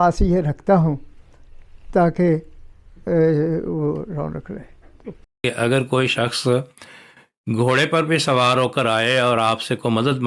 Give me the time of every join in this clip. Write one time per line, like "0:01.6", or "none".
0:05.3